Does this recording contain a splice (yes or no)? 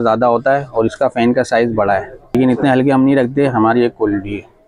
yes